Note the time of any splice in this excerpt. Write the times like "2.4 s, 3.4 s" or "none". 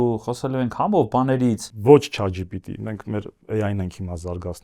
1.7 s